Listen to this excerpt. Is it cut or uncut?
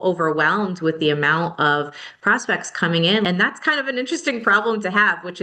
cut